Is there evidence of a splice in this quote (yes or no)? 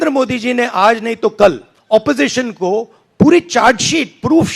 yes